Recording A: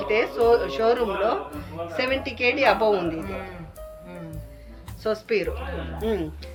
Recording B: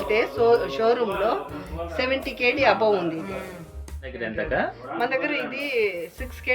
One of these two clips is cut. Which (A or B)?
B